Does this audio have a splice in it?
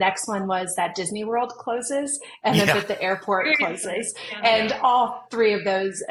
no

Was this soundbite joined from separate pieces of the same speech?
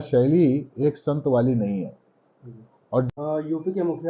yes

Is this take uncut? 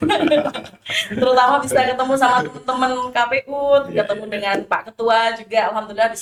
yes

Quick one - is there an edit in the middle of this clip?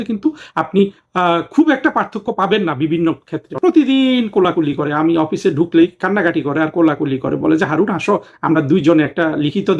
yes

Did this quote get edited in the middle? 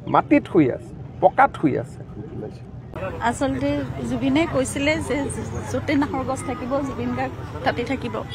yes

